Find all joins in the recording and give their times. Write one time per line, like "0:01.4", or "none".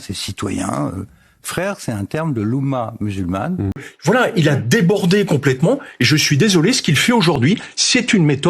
0:03.9